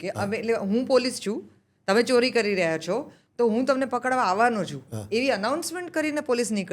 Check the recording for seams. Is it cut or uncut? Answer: uncut